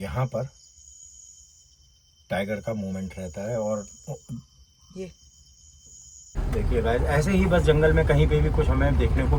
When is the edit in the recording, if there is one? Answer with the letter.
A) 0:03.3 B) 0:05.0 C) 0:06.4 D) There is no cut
C